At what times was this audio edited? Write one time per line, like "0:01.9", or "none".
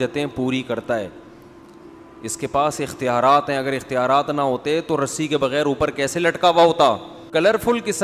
0:07.1